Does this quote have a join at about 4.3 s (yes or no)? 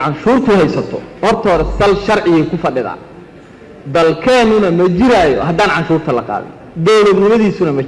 no